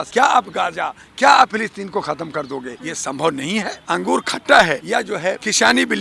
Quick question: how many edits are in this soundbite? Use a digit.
3